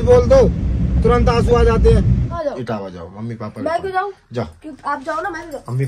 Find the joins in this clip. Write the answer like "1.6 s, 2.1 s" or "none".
2.3 s